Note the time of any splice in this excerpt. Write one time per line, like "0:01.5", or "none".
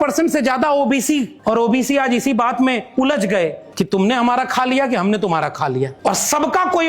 0:01.3
0:03.6
0:05.9